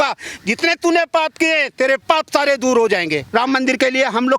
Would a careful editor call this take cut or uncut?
cut